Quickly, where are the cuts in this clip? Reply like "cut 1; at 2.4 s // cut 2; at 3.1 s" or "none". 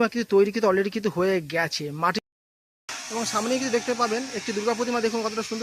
cut 1; at 2.2 s